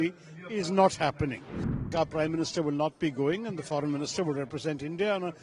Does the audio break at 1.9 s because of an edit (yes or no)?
yes